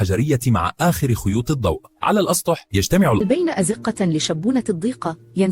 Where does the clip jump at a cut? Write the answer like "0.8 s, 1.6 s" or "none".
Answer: 3.2 s